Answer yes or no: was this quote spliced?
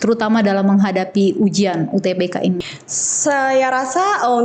yes